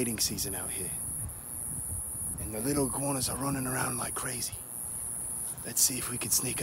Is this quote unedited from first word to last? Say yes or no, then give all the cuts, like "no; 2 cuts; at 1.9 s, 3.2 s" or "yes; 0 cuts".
yes; 0 cuts